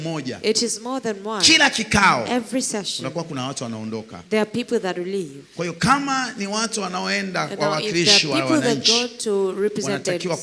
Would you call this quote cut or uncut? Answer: uncut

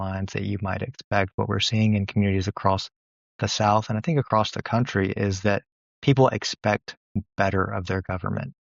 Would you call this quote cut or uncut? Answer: uncut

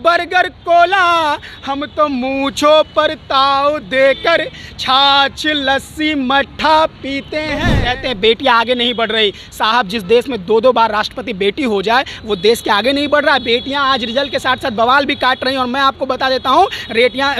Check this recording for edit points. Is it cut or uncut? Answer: cut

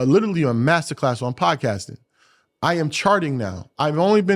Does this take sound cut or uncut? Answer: uncut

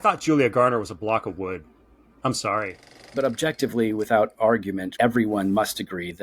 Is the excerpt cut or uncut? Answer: cut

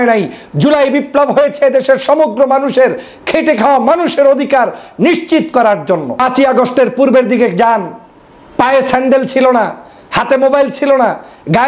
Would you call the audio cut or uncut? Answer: cut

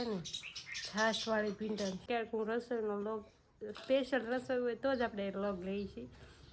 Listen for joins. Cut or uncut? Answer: cut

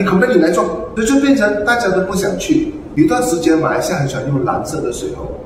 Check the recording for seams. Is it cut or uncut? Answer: cut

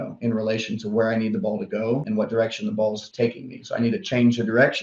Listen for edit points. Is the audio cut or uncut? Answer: cut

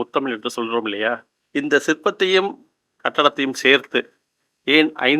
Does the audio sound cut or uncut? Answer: cut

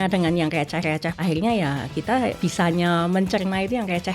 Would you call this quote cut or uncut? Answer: cut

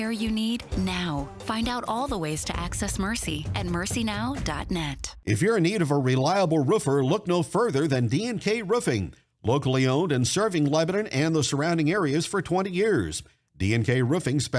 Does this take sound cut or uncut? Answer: cut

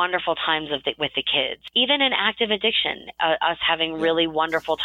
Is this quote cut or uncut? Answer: cut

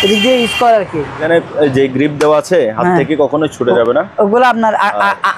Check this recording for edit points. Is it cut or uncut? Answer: cut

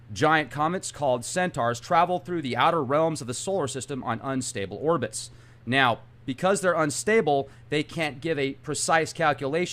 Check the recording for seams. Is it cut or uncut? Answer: cut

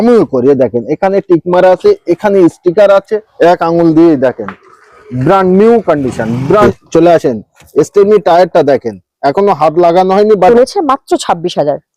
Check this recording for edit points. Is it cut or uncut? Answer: cut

